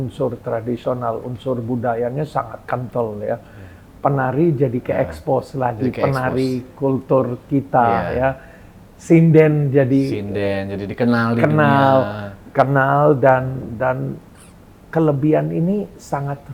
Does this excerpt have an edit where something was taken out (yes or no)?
no